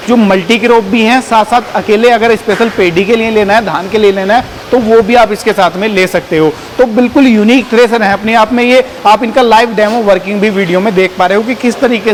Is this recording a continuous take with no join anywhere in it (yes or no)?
yes